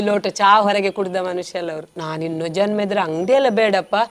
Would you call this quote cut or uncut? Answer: cut